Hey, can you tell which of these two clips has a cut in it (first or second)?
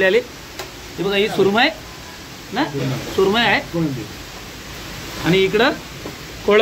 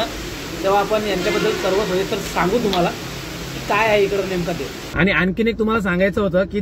second